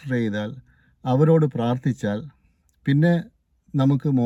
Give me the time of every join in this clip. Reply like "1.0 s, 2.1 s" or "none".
none